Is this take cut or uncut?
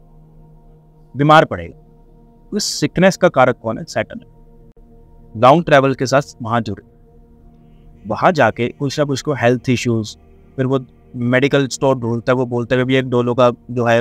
uncut